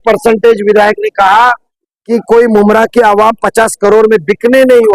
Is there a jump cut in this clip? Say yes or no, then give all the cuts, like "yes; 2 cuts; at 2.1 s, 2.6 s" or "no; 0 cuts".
no; 0 cuts